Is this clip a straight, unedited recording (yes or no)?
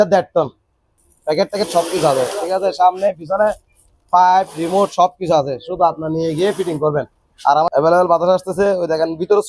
no